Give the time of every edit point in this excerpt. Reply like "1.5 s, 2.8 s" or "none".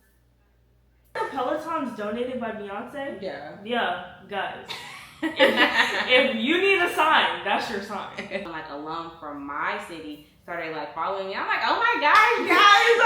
1.1 s, 8.4 s